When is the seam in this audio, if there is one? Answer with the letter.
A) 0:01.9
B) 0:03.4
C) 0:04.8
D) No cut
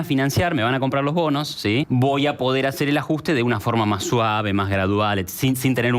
A